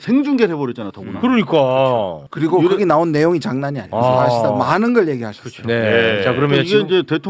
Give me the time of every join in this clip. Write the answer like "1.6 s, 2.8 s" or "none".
2.2 s, 3.8 s